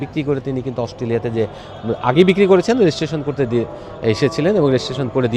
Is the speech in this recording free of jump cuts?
yes; 0 cuts

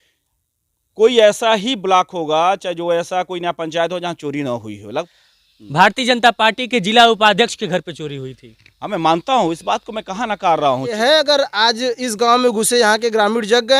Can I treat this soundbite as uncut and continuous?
no; 2 cuts; at 5.1 s, 10.9 s

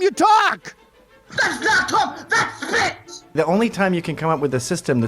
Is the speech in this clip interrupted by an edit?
yes; 1 cut; at 3.3 s

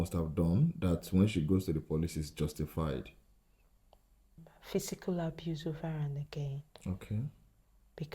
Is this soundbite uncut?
no; 1 cut; at 4.5 s

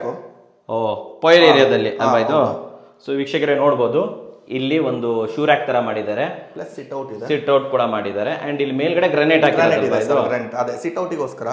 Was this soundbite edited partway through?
no; 0 cuts

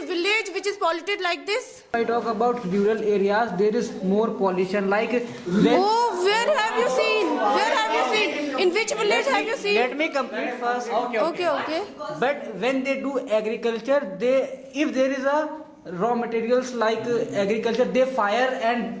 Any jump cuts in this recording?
no; 0 cuts

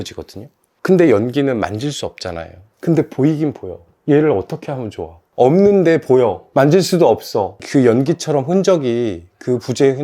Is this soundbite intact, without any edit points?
no; 1 cut; at 7.6 s

